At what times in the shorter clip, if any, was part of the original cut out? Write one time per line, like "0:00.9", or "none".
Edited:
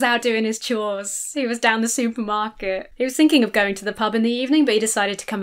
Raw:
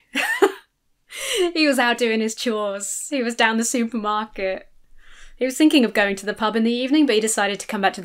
0:02.9